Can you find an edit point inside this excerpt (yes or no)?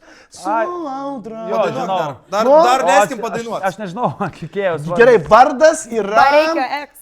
no